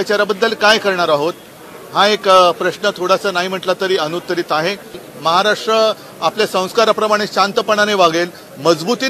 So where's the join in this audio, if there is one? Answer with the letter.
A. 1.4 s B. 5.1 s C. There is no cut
B